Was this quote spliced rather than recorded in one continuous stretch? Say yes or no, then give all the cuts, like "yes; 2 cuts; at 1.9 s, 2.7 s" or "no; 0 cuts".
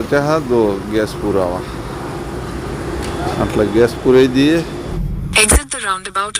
yes; 1 cut; at 5.0 s